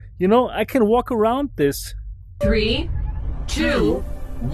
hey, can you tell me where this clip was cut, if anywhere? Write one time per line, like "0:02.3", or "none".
0:02.3